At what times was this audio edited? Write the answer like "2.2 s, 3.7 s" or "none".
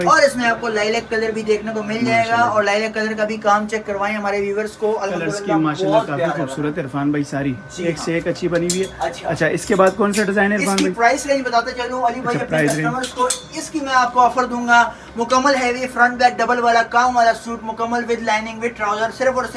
none